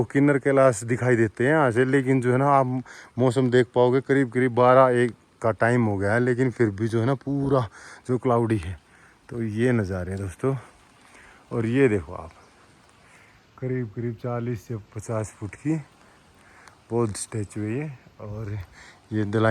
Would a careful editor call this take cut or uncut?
uncut